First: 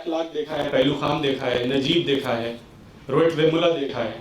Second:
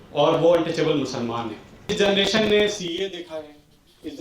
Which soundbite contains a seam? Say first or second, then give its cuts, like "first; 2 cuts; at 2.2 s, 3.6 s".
second; 1 cut; at 1.9 s